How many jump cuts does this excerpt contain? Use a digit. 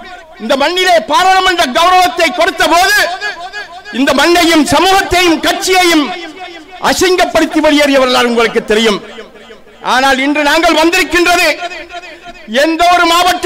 0